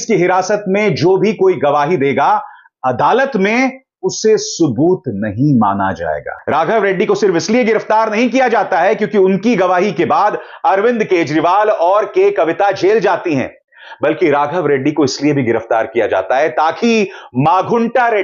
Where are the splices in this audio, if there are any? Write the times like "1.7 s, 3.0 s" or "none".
6.3 s